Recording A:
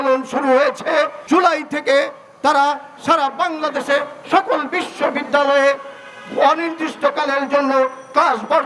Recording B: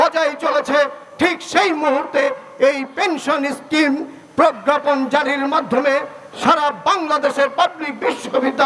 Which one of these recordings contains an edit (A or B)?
A